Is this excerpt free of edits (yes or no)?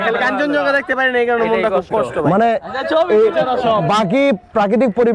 yes